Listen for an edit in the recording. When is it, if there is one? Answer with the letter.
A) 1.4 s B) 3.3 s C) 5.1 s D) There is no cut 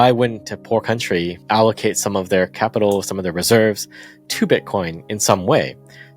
A